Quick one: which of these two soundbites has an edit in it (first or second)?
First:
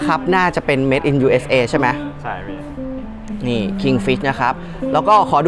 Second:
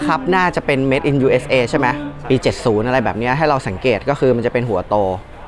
second